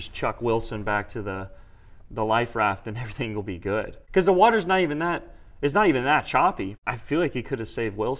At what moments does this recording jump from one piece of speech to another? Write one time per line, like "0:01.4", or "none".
0:06.8